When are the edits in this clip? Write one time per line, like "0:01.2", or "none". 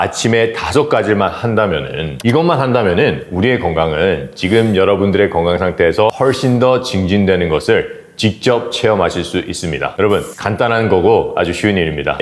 0:02.2
0:06.2